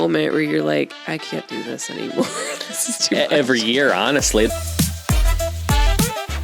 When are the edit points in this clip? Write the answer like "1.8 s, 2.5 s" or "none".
4.5 s